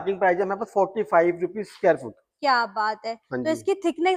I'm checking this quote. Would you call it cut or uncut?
uncut